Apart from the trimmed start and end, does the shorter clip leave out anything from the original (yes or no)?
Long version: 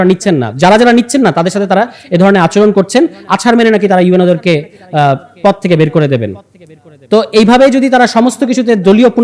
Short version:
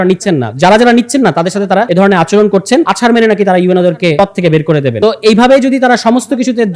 yes